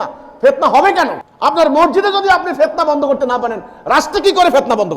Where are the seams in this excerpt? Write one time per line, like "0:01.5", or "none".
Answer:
0:01.2